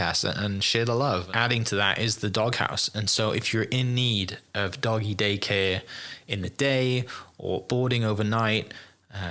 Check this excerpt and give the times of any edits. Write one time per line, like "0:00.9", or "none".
0:01.3